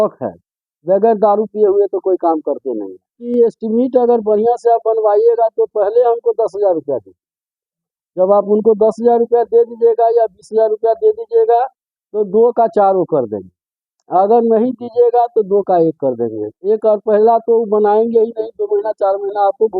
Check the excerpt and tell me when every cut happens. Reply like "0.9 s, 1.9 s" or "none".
3.2 s